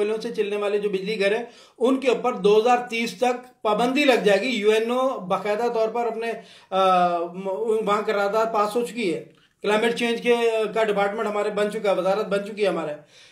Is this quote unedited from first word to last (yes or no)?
yes